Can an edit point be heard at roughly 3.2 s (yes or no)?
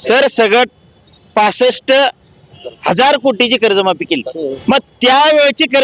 no